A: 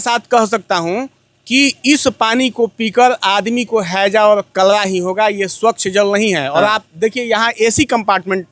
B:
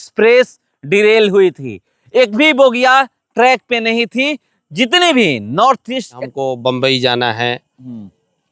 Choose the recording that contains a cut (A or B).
B